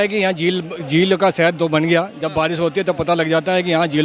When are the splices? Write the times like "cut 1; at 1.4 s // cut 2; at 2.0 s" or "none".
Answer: none